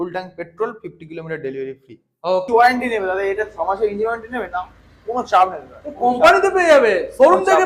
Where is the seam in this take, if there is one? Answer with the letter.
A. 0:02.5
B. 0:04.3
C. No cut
A